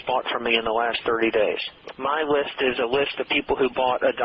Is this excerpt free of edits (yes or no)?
no